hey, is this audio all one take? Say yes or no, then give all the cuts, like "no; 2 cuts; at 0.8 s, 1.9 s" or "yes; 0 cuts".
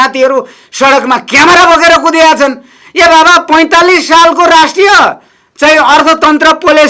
yes; 0 cuts